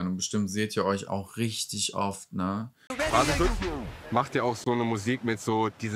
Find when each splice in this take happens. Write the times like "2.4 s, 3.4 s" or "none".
2.9 s